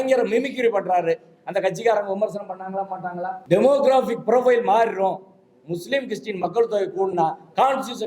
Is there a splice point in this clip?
yes; 1 cut; at 3.4 s

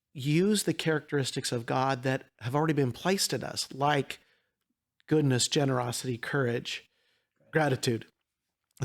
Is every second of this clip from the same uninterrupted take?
no; 1 cut; at 7.5 s

